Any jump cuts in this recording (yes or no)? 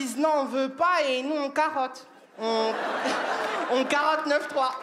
no